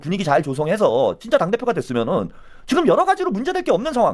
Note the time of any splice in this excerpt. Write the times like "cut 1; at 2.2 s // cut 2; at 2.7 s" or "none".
none